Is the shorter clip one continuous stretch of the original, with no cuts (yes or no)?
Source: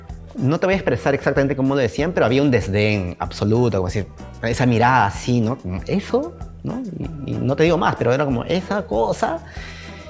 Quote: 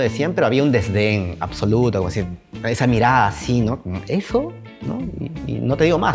yes